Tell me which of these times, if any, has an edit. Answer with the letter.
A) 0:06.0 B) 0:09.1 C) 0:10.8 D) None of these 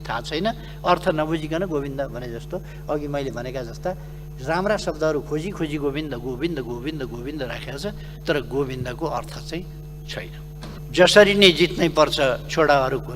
C